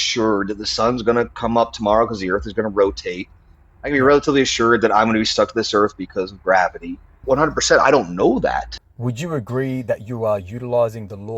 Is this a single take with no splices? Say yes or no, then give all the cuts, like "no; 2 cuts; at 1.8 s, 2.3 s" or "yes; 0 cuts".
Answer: no; 2 cuts; at 7.1 s, 8.8 s